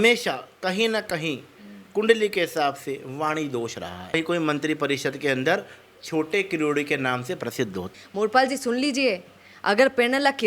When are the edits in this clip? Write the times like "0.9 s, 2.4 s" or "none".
4.1 s, 8.0 s